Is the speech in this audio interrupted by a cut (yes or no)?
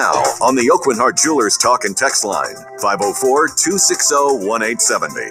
no